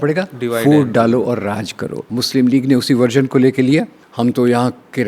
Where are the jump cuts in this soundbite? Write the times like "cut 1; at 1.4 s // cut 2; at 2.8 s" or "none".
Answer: cut 1; at 2.1 s // cut 2; at 4.0 s